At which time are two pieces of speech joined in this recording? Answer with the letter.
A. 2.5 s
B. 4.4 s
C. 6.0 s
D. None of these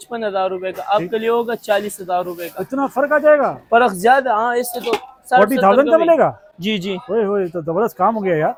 D